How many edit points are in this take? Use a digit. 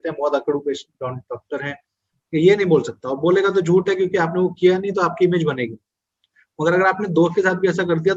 0